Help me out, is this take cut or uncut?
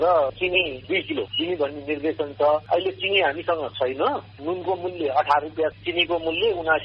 cut